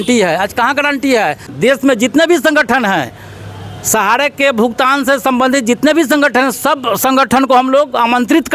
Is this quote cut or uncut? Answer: cut